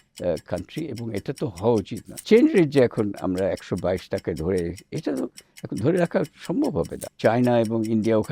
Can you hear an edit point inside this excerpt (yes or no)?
yes